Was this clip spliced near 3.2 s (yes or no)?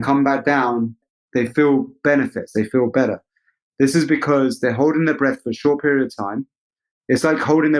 no